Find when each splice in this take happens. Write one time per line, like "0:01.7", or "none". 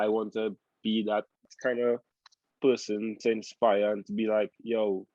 0:01.5